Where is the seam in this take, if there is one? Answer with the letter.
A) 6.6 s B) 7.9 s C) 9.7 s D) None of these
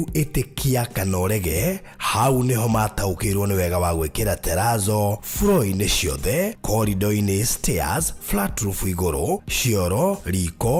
D